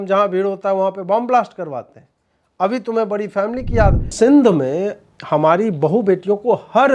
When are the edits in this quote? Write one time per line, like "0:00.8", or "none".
0:04.1